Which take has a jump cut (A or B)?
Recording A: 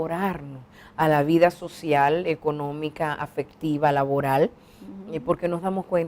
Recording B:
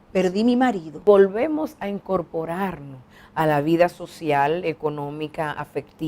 B